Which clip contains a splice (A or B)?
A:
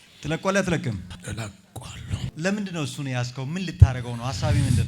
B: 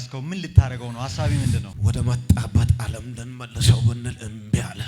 A